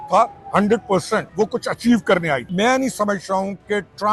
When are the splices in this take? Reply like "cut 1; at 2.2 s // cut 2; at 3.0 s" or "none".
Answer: cut 1; at 1.3 s // cut 2; at 2.5 s